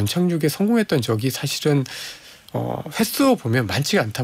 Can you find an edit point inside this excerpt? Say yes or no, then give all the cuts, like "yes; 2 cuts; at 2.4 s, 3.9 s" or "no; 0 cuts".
no; 0 cuts